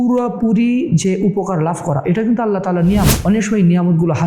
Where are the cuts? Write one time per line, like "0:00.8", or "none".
0:03.2